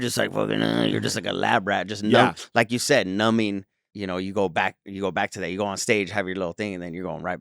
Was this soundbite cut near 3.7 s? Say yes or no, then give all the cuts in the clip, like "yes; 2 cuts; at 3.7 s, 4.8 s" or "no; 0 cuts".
yes; 1 cut; at 3.7 s